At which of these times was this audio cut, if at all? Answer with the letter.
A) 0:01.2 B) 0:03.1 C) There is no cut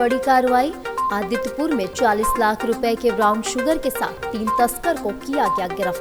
C